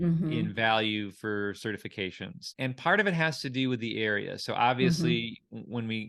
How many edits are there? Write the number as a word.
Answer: one